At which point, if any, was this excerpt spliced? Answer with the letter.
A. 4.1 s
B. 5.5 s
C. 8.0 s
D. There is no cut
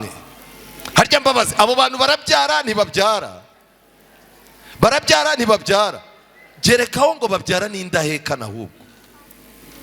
D